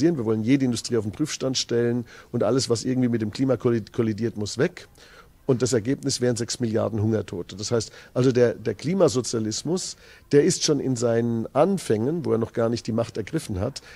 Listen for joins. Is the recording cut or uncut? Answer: uncut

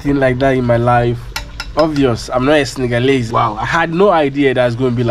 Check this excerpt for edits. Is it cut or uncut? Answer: cut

